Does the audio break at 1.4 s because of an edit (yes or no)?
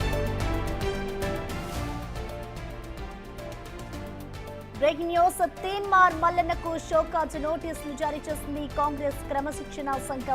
yes